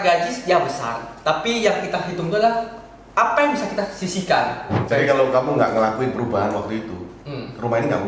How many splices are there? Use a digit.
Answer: 1